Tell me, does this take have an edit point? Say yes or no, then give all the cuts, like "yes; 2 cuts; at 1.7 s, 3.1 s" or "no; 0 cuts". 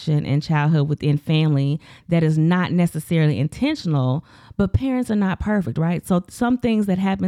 no; 0 cuts